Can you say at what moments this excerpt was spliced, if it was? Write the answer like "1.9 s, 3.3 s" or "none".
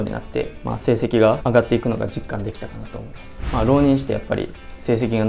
3.5 s